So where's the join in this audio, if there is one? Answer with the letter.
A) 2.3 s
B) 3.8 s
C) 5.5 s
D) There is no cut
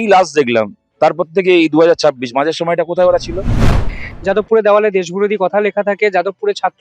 B